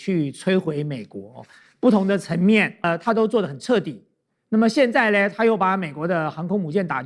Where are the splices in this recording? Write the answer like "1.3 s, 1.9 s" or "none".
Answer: 2.9 s